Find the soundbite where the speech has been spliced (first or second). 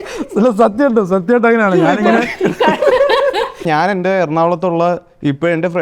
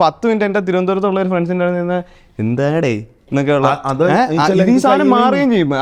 first